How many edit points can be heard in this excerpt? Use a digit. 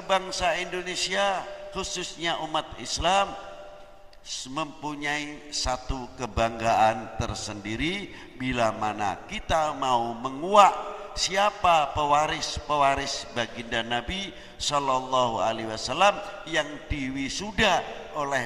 0